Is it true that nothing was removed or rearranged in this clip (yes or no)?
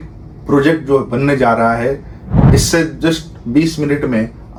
yes